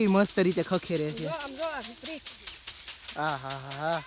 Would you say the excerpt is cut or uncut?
uncut